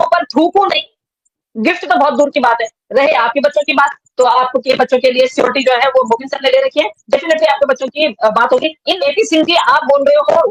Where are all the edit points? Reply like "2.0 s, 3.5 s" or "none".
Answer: none